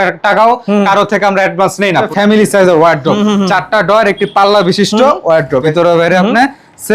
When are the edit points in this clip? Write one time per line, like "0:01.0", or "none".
0:02.1
0:05.7